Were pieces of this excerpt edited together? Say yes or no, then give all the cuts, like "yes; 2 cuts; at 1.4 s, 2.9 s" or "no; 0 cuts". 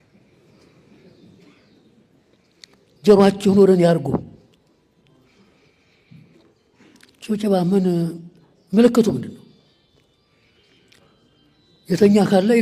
no; 0 cuts